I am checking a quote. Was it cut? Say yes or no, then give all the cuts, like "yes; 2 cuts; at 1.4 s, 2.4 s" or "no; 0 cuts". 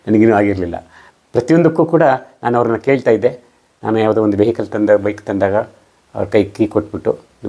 no; 0 cuts